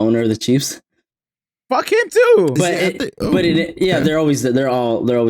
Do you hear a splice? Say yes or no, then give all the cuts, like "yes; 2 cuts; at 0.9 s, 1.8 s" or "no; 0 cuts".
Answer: no; 0 cuts